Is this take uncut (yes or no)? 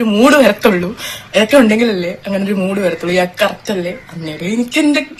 yes